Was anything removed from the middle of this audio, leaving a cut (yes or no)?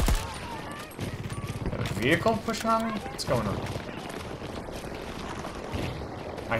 no